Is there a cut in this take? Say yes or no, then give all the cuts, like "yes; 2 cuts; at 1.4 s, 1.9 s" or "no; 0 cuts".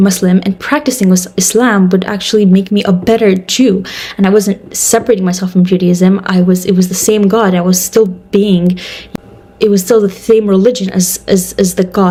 no; 0 cuts